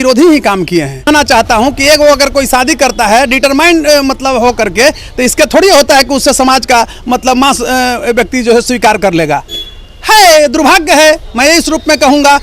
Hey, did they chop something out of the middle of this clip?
yes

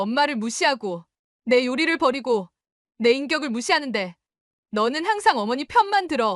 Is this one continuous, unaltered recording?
yes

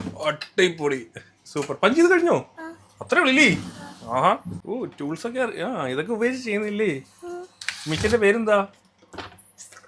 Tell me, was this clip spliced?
yes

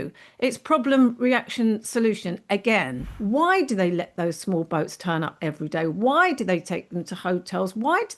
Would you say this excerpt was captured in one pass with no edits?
no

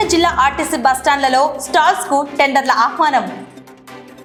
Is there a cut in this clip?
no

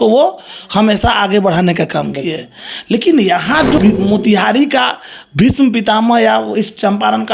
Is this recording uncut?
no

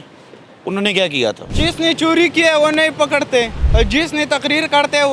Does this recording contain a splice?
yes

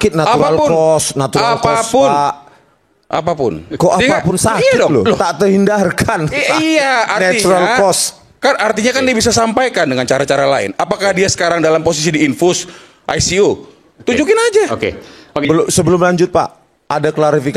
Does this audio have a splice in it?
yes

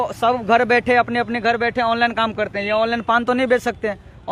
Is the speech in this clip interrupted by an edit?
no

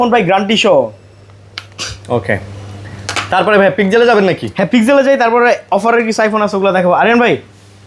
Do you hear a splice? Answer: no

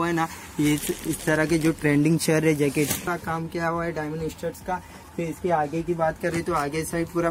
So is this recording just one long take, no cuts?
no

